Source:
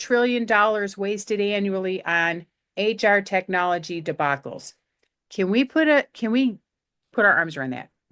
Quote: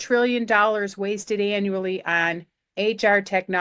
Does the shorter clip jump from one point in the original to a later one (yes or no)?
no